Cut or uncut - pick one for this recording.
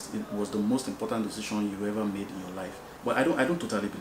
cut